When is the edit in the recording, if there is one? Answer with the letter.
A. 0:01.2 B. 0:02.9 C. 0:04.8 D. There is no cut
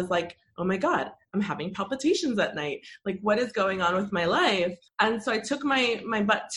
C